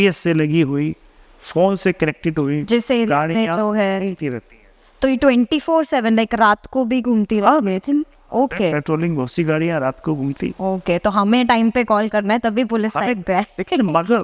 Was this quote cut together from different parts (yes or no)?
no